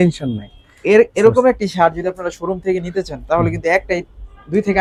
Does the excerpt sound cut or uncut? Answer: uncut